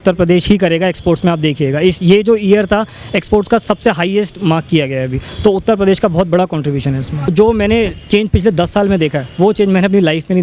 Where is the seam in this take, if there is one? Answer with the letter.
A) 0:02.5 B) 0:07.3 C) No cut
B